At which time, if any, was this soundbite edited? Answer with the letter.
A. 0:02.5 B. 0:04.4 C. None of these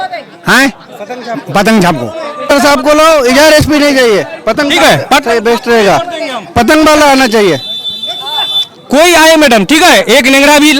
A